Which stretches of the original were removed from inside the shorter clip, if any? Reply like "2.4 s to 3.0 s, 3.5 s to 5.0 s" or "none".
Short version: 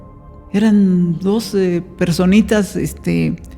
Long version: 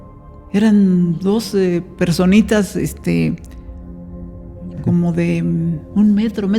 none